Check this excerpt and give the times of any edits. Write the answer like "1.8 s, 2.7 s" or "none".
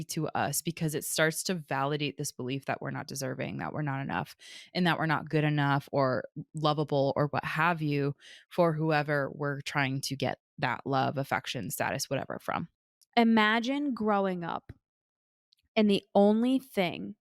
12.8 s